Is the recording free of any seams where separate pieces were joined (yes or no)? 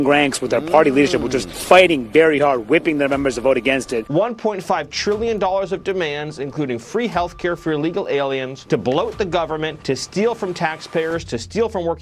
no